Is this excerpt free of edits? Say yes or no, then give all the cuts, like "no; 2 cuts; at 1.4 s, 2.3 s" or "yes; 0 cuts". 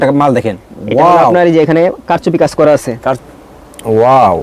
no; 1 cut; at 3.2 s